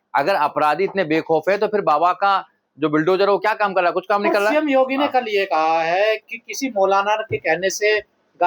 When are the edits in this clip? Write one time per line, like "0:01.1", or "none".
none